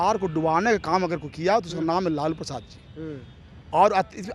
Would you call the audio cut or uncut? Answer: uncut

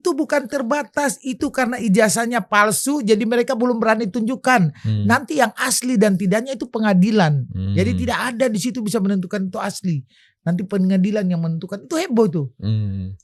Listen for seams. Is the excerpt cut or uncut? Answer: uncut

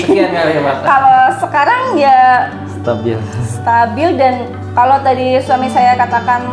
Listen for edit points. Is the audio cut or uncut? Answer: uncut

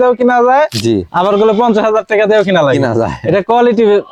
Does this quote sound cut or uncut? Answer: uncut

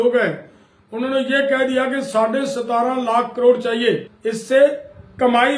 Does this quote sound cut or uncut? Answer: cut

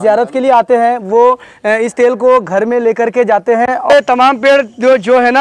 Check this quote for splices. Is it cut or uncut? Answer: cut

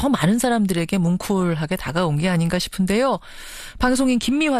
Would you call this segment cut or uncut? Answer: uncut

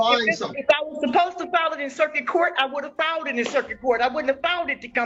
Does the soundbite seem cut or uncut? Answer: uncut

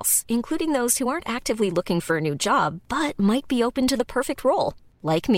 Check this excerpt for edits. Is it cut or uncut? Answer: uncut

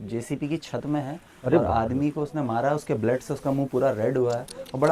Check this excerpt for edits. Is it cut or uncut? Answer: uncut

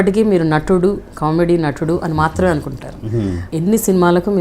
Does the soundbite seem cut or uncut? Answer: cut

